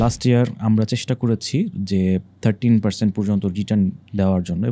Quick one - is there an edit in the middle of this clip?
no; 0 cuts

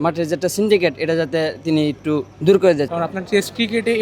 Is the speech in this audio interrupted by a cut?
yes; 2 cuts; at 2.3 s, 2.9 s

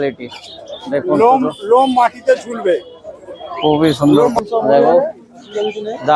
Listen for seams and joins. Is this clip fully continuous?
no; 1 cut; at 4.4 s

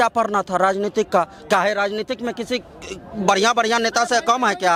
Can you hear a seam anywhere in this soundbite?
no; 0 cuts

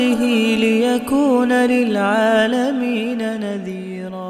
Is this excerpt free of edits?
yes; 0 cuts

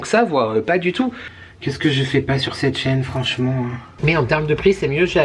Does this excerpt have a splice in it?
yes; 2 cuts; at 1.2 s, 3.9 s

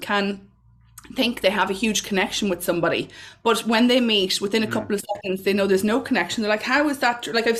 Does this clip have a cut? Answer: no; 0 cuts

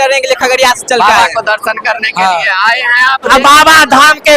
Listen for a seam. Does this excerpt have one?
yes; 1 cut; at 3.3 s

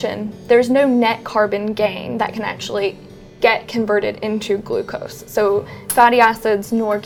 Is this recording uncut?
yes; 0 cuts

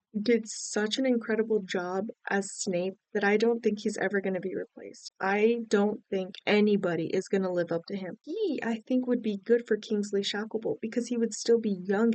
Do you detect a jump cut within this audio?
yes; 2 cuts; at 5.0 s, 8.2 s

